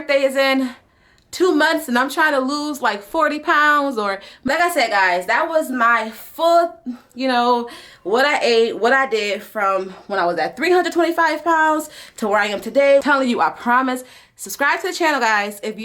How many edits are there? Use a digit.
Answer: 2